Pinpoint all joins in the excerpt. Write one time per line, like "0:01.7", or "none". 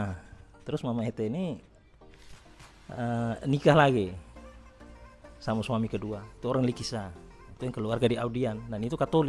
none